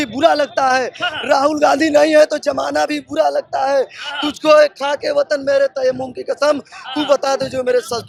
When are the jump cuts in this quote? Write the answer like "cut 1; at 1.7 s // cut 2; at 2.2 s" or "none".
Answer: none